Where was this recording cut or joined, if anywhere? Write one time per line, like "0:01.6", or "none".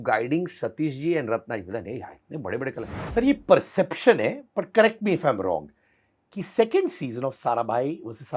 0:02.9